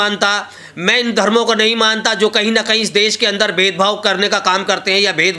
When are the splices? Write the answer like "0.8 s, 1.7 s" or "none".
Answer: none